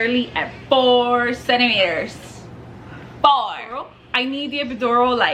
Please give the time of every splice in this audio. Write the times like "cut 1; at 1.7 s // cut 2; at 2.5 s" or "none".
none